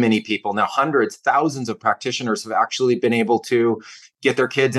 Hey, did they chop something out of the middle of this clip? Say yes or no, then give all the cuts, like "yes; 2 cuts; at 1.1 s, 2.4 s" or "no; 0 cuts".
no; 0 cuts